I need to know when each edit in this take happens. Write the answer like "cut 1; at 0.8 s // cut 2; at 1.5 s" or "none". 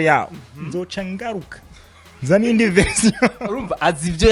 none